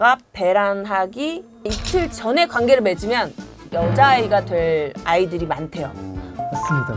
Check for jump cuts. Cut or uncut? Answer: uncut